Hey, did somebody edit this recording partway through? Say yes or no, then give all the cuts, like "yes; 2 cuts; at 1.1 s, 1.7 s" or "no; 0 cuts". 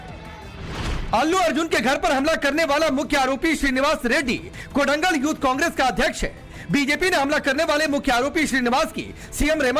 yes; 1 cut; at 6.8 s